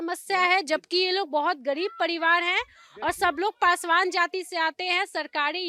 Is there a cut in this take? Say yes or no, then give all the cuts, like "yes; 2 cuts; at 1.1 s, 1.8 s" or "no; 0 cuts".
no; 0 cuts